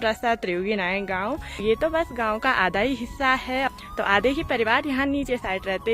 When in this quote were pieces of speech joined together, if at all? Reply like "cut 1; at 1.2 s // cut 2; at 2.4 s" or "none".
none